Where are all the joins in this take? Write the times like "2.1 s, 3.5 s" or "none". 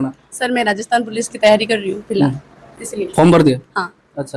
none